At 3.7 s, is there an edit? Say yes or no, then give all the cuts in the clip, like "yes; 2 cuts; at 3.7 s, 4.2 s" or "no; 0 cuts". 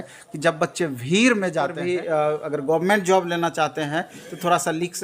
no; 1 cut; at 1.7 s